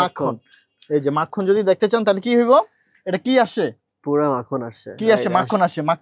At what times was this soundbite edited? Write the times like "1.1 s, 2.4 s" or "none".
none